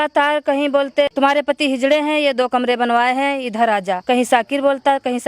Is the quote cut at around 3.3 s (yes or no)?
no